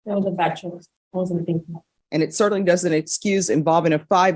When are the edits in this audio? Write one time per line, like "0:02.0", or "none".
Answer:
0:00.9
0:01.9